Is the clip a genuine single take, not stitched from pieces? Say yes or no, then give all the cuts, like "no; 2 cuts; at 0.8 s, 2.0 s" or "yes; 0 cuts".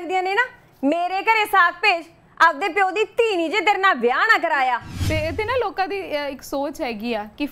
no; 1 cut; at 4.9 s